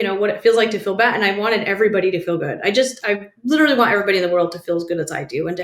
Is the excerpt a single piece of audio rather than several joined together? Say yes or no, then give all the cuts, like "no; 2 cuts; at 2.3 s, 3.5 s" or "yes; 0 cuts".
yes; 0 cuts